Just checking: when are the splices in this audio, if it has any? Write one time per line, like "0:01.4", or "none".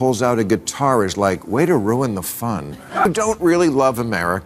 0:02.9